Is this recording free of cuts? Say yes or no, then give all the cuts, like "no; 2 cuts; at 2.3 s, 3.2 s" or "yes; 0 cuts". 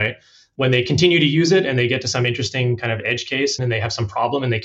no; 1 cut; at 3.6 s